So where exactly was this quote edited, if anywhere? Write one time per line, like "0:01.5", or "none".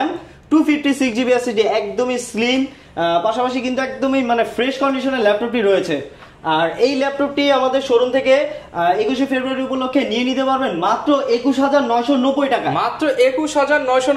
none